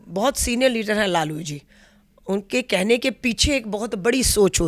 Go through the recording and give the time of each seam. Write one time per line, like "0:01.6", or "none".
none